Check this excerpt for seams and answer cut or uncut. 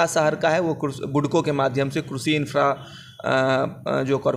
uncut